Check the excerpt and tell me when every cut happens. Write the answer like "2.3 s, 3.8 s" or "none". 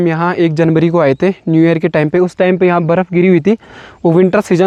none